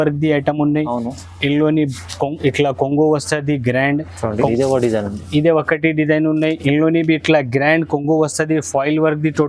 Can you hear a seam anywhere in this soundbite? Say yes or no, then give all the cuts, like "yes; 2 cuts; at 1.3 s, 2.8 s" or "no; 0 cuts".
yes; 1 cut; at 4.5 s